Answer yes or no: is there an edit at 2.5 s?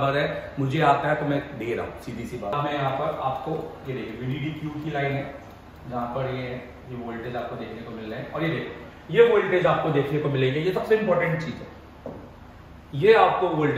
yes